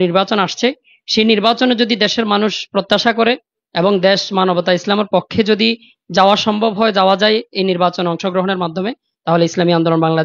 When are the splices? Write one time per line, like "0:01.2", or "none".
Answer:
none